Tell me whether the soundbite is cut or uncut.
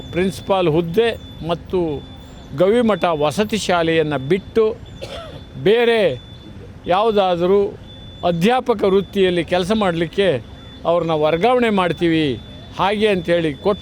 uncut